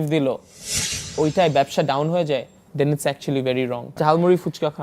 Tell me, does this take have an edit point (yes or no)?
yes